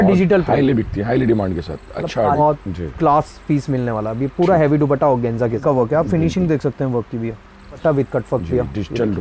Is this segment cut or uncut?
cut